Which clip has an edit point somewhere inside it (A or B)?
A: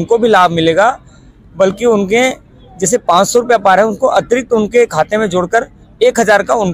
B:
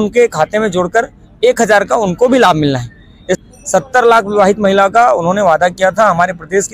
B